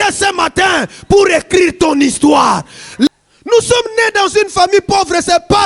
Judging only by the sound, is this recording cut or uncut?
cut